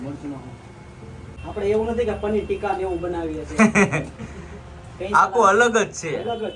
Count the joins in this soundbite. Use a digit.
1